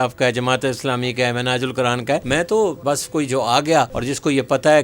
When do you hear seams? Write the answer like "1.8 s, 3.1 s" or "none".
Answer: 2.2 s, 2.8 s, 4.0 s